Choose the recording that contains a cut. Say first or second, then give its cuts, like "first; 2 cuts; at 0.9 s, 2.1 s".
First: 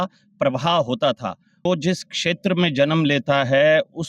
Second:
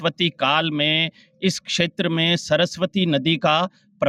first; 1 cut; at 1.5 s